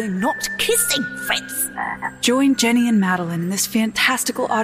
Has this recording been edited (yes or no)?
yes